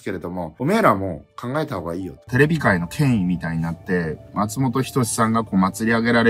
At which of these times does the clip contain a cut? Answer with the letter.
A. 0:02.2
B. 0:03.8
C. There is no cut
A